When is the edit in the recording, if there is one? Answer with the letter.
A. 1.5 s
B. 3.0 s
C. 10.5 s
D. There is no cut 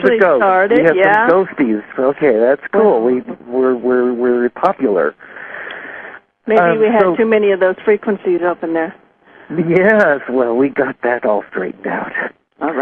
B